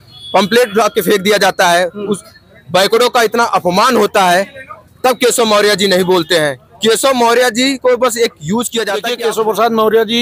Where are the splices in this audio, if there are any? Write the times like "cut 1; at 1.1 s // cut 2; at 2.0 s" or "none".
cut 1; at 9.0 s